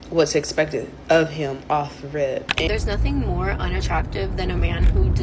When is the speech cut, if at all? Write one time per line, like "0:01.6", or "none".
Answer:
0:02.7